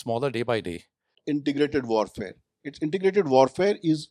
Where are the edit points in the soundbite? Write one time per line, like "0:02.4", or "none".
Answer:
0:01.2